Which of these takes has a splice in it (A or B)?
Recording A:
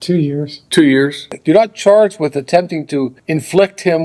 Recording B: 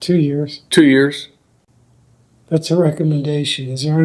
A